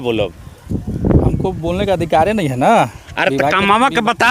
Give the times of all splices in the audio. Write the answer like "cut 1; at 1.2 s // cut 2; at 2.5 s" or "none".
none